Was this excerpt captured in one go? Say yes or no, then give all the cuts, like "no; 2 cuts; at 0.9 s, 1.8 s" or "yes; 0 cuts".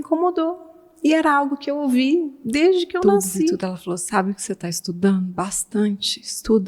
no; 1 cut; at 3.6 s